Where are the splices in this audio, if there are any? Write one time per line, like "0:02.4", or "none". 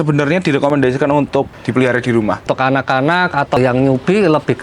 0:02.5
0:03.6